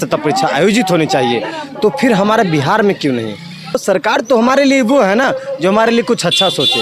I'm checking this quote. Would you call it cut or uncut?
cut